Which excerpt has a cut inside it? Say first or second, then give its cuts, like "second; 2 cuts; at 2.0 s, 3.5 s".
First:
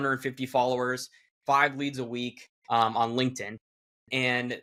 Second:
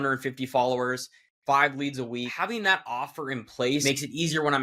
second; 2 cuts; at 2.3 s, 3.8 s